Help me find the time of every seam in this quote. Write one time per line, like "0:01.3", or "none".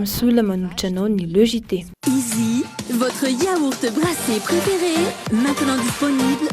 0:01.9